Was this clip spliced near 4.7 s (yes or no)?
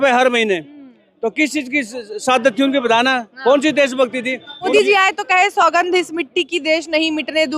yes